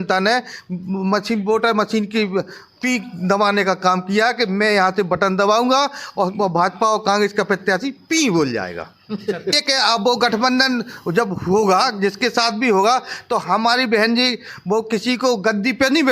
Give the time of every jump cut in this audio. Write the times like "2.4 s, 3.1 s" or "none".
9.5 s